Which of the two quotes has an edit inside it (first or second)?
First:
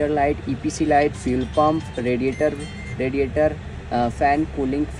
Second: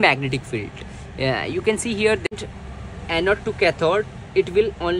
second